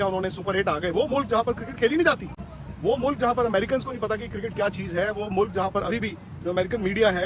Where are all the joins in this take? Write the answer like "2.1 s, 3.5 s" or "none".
none

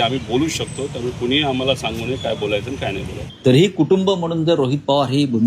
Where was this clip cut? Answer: 3.2 s

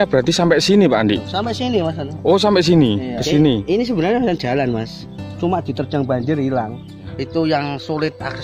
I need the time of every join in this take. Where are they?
3.2 s, 7.1 s

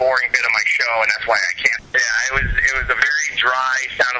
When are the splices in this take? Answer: 1.8 s

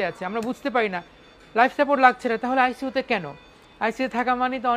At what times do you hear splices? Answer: none

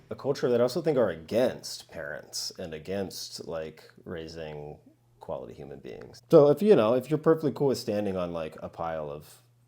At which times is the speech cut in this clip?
6.2 s

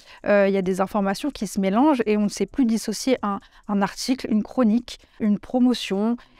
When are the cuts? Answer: 5.2 s

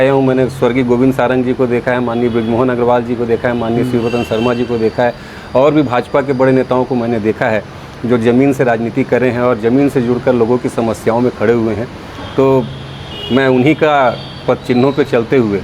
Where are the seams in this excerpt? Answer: none

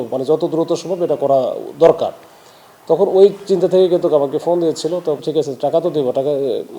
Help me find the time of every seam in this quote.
5.2 s

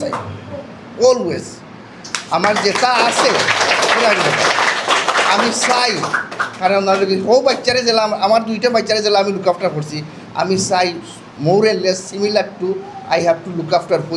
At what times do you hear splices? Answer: none

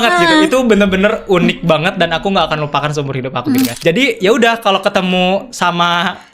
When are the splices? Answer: 3.8 s

